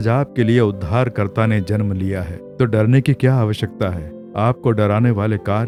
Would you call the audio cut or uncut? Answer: uncut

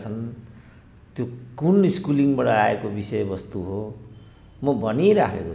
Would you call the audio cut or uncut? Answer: uncut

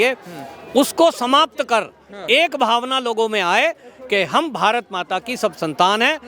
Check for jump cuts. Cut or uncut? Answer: uncut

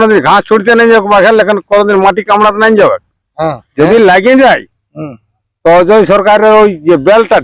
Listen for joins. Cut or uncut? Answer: cut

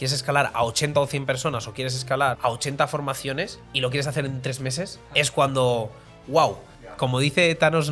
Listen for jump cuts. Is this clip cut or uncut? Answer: cut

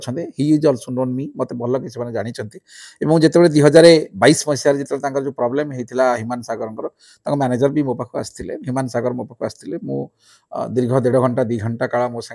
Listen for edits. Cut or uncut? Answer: uncut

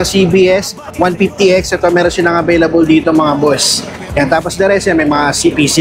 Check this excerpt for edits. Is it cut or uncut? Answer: uncut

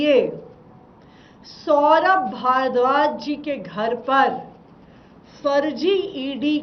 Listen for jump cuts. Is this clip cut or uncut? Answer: uncut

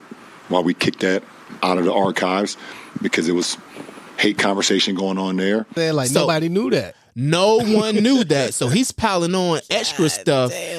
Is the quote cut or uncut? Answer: cut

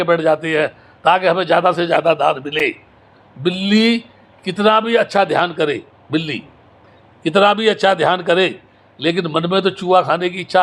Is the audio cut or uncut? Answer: uncut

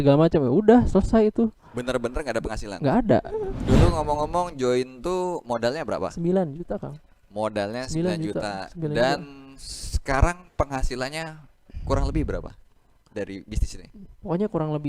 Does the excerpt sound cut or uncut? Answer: cut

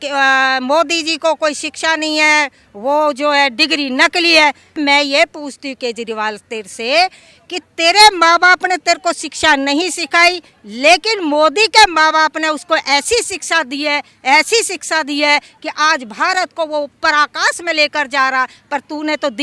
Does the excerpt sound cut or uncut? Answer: uncut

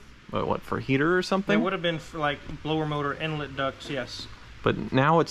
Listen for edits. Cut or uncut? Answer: uncut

